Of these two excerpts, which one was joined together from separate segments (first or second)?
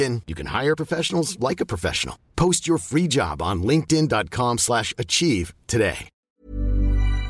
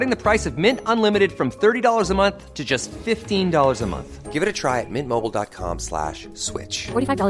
first